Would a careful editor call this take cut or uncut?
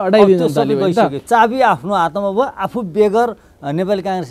cut